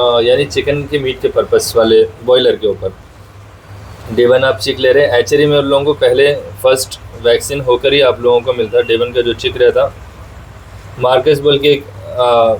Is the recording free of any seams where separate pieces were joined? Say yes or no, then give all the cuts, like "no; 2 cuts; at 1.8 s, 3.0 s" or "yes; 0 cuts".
yes; 0 cuts